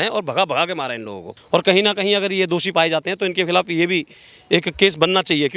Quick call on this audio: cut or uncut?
cut